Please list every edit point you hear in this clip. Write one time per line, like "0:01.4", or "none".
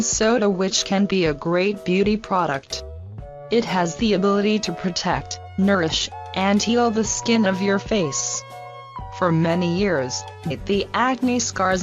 none